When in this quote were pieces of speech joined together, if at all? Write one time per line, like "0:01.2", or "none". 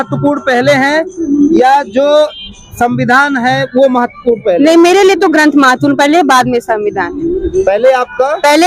none